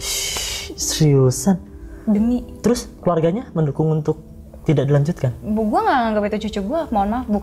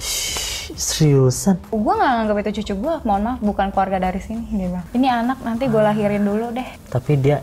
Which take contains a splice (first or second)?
second